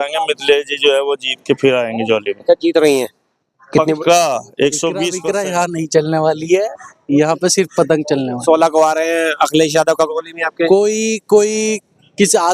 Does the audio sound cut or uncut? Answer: cut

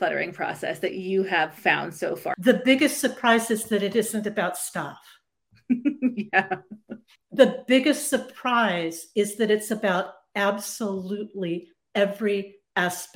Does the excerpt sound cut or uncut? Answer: cut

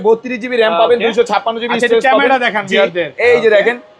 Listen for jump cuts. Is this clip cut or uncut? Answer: uncut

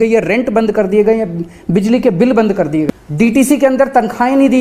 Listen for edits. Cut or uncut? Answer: cut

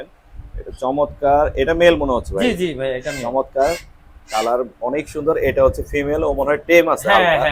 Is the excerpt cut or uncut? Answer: uncut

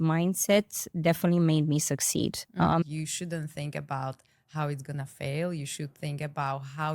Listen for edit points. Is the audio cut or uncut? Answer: cut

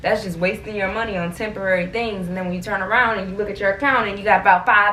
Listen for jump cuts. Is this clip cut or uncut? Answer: uncut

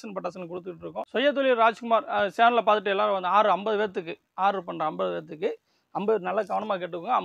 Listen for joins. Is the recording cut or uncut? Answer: cut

